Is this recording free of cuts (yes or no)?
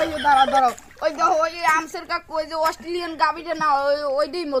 yes